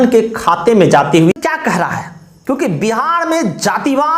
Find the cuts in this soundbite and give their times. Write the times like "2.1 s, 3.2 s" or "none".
1.3 s